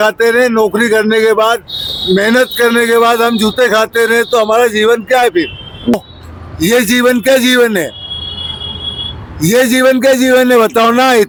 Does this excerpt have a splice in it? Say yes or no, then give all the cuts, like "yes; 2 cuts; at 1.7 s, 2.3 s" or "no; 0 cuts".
no; 0 cuts